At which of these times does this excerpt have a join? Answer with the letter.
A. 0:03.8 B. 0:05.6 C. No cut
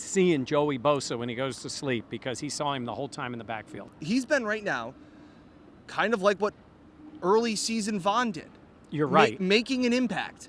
A